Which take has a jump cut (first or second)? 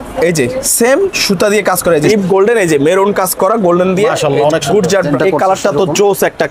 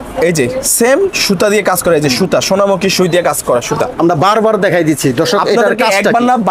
first